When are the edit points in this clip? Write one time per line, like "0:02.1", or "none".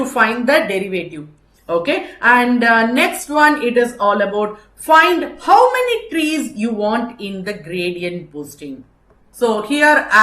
0:09.2